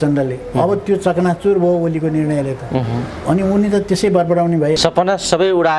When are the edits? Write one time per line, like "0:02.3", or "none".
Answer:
0:04.8